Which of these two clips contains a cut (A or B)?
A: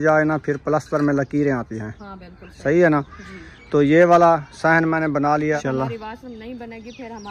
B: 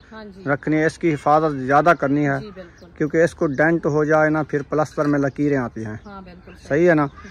A